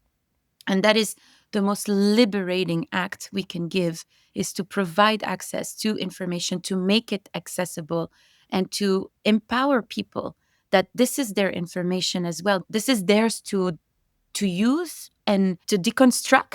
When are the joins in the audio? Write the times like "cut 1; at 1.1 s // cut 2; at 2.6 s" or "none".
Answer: cut 1; at 12.6 s // cut 2; at 15.6 s